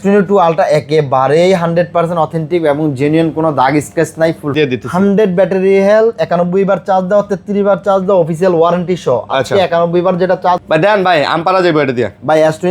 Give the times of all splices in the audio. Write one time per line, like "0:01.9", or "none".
0:04.5
0:10.6